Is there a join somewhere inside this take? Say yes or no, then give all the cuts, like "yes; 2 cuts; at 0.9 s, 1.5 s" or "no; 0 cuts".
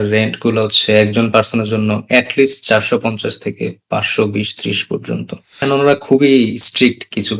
yes; 1 cut; at 5.6 s